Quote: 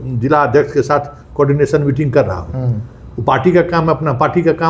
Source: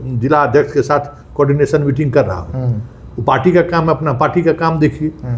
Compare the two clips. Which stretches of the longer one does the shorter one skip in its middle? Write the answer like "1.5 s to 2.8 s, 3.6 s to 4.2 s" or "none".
none